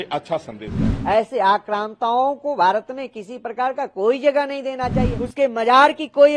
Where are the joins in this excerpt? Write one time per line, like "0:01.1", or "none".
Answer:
0:01.0
0:05.2